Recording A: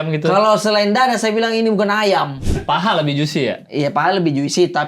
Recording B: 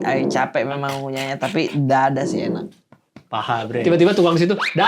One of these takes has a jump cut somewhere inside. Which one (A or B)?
A